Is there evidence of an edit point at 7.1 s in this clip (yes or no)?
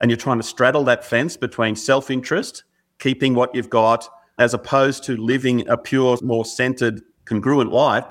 yes